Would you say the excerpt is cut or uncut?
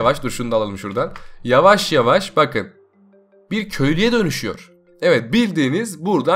uncut